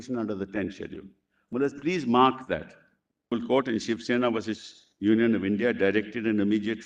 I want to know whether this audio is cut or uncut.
cut